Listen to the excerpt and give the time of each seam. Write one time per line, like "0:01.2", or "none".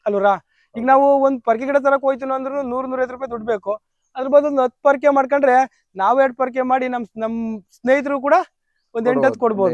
none